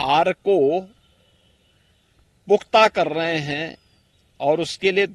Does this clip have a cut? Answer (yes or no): no